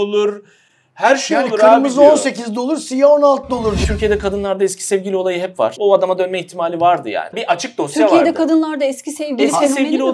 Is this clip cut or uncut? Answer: cut